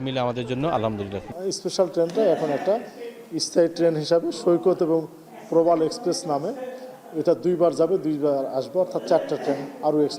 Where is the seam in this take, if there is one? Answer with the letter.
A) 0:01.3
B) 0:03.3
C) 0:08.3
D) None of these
A